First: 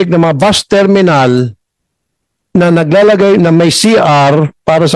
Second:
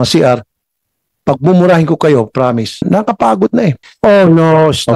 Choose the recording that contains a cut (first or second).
second